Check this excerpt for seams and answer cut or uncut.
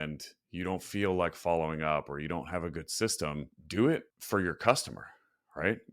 cut